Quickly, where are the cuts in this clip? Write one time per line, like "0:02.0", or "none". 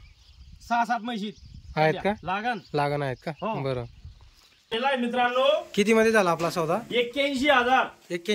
0:04.7